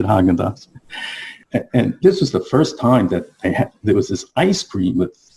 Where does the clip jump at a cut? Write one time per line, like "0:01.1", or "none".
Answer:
0:01.4